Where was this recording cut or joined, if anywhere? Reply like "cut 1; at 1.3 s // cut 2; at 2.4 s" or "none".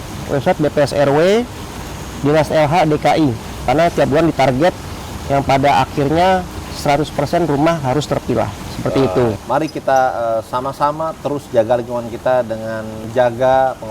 cut 1; at 3.6 s // cut 2; at 9.4 s // cut 3; at 13.0 s